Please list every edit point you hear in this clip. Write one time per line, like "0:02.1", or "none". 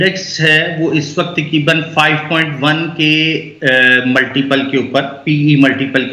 none

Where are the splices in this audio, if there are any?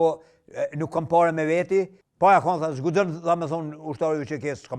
0:02.0

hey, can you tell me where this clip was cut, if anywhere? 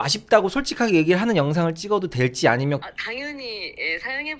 0:02.8

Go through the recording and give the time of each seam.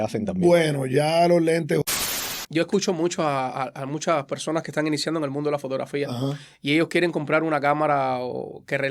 0:01.8

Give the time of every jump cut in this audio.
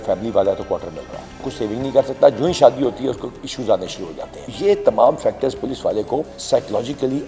0:01.6
0:04.5
0:06.4

